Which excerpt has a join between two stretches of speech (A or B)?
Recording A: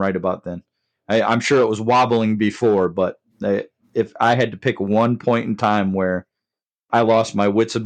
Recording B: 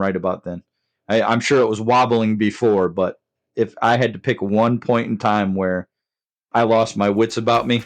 B